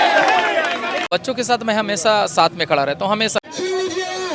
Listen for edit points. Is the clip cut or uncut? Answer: cut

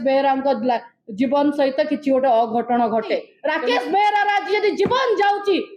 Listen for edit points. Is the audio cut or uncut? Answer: cut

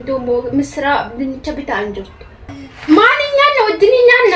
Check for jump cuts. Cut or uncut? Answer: cut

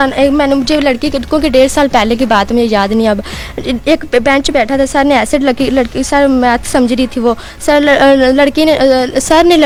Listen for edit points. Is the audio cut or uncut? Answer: uncut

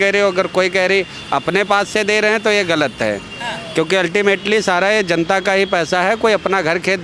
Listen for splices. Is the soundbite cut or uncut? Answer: uncut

